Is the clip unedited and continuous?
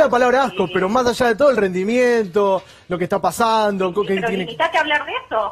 no; 1 cut; at 4.0 s

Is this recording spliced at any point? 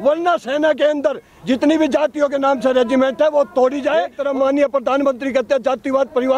yes; 1 cut; at 4.2 s

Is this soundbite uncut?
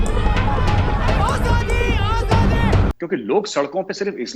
no; 1 cut; at 2.9 s

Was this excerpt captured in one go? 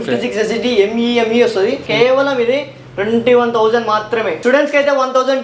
no; 2 cuts; at 1.8 s, 4.4 s

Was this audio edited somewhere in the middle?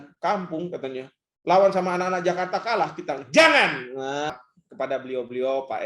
yes; 1 cut; at 4.3 s

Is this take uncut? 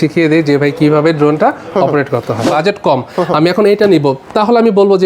no; 1 cut; at 2.4 s

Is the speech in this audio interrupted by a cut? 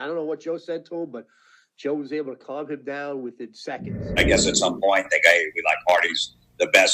yes; 1 cut; at 4.2 s

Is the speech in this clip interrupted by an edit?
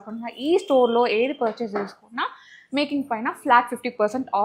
no; 0 cuts

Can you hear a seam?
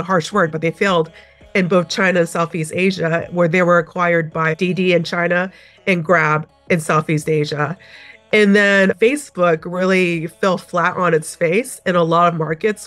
no; 0 cuts

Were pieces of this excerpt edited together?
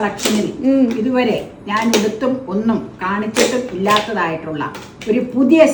no; 0 cuts

